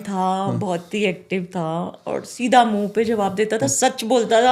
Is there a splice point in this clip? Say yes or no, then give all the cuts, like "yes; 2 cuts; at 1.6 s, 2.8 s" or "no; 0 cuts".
no; 0 cuts